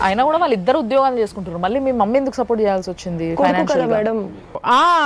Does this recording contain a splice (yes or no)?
no